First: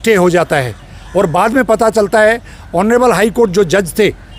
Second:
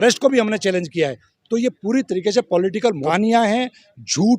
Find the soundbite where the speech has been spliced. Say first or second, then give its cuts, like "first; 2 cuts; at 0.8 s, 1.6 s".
second; 1 cut; at 3.0 s